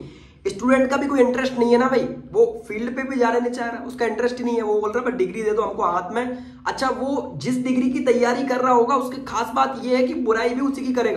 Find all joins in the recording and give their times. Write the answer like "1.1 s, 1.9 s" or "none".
none